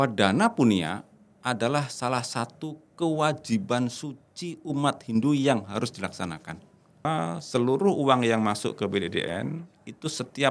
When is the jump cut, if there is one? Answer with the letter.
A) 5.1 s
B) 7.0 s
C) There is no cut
B